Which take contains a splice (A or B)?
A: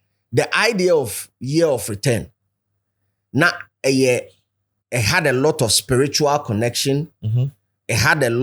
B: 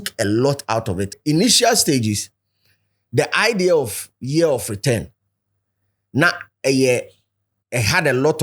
B